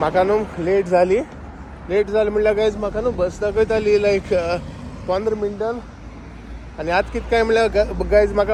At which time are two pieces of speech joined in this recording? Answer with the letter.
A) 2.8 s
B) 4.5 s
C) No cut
C